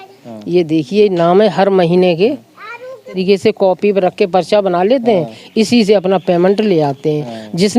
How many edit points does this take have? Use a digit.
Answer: 1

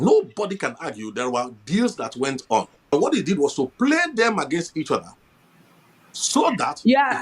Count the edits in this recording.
1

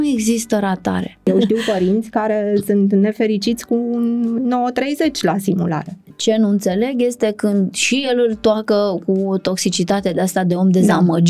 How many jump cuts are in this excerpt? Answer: 2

